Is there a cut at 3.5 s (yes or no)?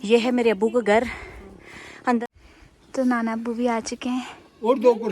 no